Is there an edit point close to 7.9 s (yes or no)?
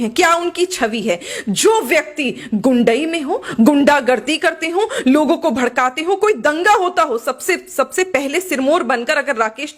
no